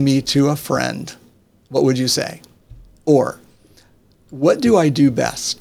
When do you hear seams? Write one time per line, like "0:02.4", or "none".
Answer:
none